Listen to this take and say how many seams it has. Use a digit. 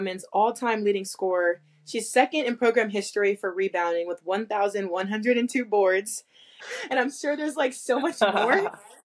1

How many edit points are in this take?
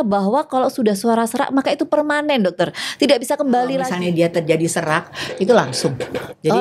1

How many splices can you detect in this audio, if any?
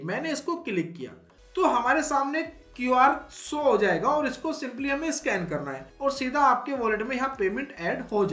2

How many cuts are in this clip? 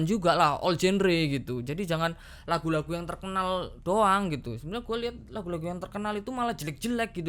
0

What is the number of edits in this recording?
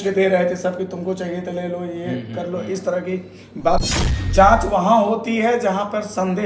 1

